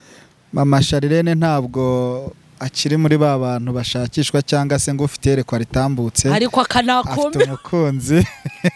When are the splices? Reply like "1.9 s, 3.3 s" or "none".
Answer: none